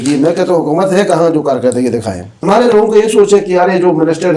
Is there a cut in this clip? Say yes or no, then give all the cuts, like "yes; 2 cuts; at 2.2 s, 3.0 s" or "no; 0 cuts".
yes; 1 cut; at 2.4 s